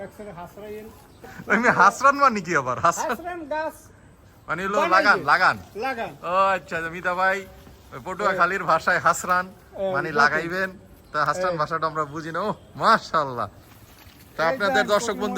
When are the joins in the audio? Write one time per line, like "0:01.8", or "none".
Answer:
0:01.3